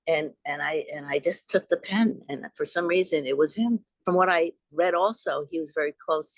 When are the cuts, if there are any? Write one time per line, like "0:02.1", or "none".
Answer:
0:03.9